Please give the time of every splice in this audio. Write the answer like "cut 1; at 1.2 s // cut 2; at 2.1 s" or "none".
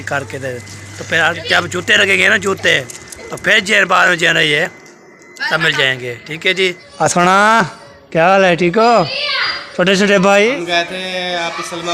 cut 1; at 1.4 s // cut 2; at 6.8 s // cut 3; at 10.5 s